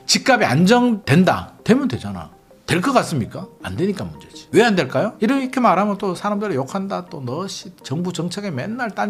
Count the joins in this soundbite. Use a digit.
1